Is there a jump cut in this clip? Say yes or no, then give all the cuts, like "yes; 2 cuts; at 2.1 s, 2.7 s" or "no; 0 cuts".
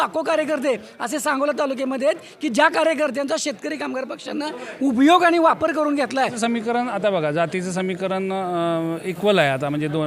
yes; 1 cut; at 6.4 s